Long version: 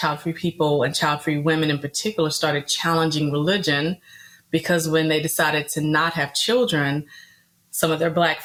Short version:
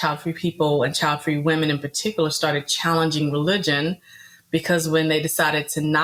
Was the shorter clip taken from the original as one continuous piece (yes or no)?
yes